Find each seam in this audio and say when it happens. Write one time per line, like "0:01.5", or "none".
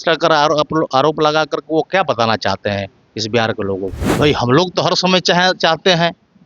0:04.0